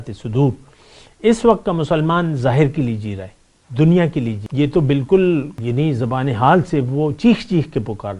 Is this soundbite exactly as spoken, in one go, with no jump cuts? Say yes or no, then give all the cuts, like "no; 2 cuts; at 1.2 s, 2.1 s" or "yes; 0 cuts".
no; 2 cuts; at 4.4 s, 5.6 s